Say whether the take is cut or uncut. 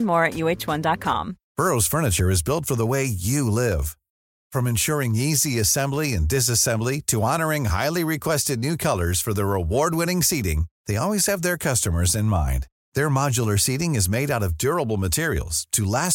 cut